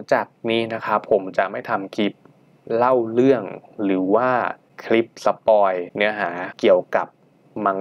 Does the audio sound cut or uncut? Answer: cut